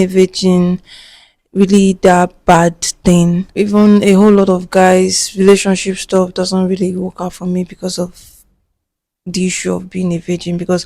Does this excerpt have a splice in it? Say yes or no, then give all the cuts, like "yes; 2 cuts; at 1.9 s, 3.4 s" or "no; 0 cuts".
yes; 1 cut; at 3.5 s